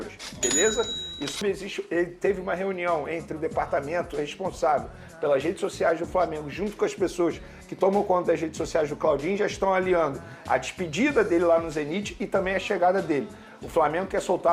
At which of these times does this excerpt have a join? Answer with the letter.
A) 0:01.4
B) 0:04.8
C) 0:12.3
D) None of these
A